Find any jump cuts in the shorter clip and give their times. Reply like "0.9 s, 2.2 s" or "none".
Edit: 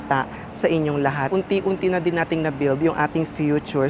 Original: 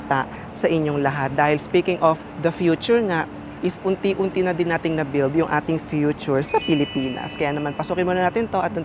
1.3 s